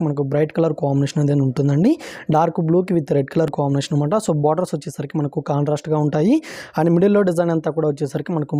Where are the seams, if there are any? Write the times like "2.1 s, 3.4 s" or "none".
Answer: none

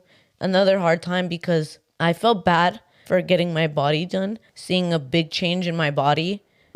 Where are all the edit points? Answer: 4.5 s

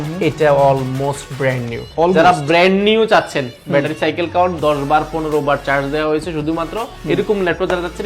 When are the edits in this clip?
none

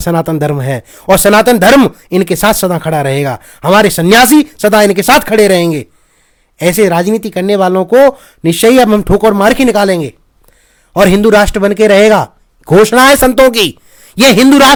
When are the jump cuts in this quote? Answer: none

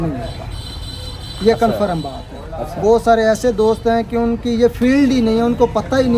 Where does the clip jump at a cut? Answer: none

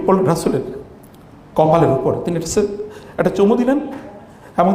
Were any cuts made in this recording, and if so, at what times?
none

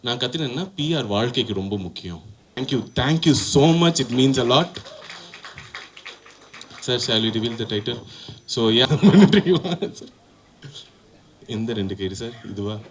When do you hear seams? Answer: 2.5 s, 8.8 s

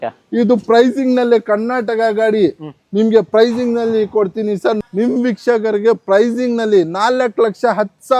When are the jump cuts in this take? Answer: 4.8 s

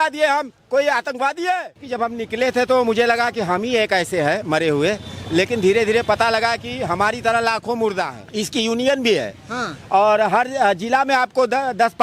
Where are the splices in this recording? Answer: 1.8 s, 8.2 s

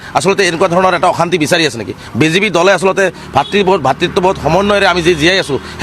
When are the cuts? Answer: none

